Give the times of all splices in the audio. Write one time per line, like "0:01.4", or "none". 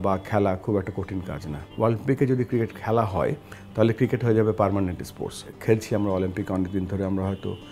0:01.6
0:05.5